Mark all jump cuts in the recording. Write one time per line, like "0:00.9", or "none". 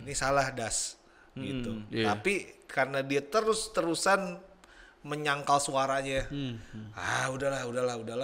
none